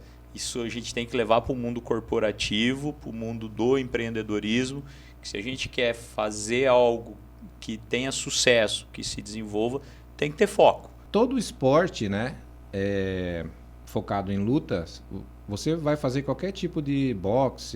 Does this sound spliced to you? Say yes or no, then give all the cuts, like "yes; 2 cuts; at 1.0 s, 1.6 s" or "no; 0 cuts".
yes; 1 cut; at 10.9 s